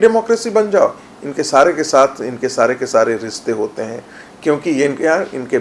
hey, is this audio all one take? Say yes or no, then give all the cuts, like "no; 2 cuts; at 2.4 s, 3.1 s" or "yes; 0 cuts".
yes; 0 cuts